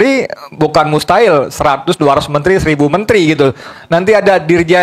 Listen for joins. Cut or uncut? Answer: cut